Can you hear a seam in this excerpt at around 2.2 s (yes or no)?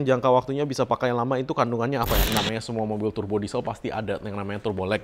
yes